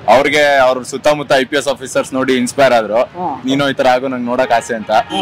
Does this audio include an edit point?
yes; 1 cut; at 3.4 s

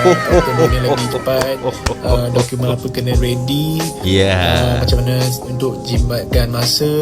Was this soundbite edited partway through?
no; 0 cuts

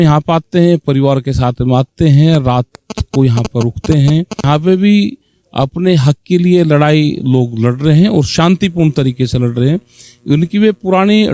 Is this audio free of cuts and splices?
no; 1 cut; at 4.4 s

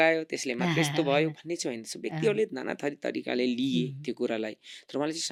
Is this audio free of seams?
yes; 0 cuts

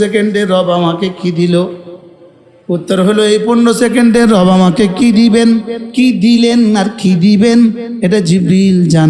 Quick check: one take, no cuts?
yes; 0 cuts

